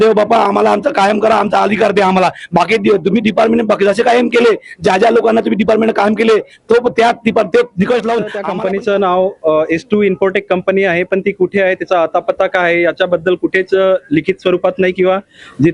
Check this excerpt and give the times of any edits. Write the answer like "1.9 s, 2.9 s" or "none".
8.4 s